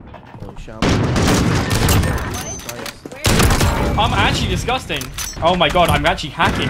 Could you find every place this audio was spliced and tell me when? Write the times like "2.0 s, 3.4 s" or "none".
5.3 s